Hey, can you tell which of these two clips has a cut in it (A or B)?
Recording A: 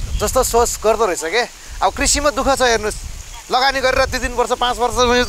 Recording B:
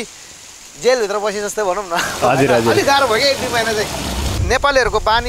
B